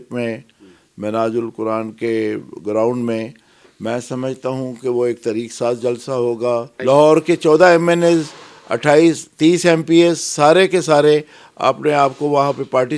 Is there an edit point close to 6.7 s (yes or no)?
yes